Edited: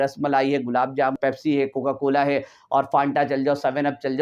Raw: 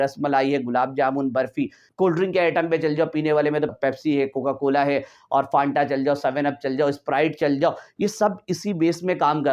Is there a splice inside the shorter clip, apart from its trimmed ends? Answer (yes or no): yes